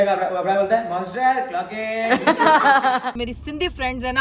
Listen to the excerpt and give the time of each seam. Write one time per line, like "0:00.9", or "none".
0:03.1